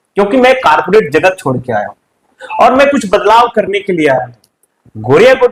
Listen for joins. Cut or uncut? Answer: uncut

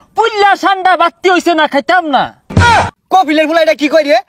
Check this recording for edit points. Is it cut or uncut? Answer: cut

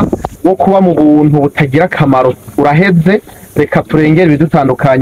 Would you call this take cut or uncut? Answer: uncut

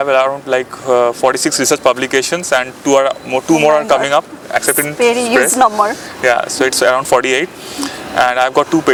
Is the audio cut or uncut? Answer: uncut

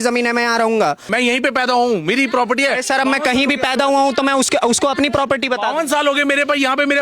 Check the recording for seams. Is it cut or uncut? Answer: cut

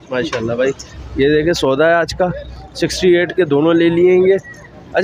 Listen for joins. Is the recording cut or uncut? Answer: uncut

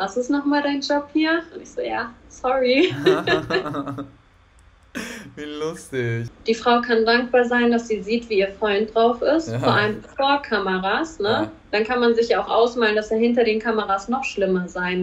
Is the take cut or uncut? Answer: uncut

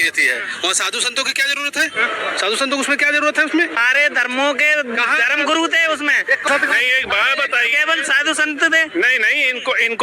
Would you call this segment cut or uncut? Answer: cut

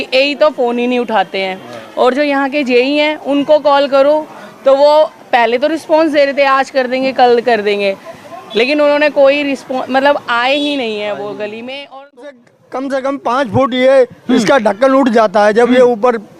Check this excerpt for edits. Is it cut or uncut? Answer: cut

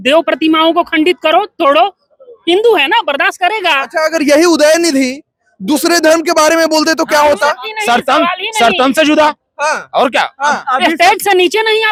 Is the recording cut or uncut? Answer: uncut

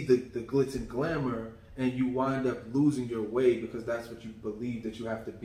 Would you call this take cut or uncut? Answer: uncut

